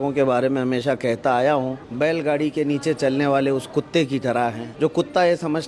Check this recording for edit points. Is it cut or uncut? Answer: cut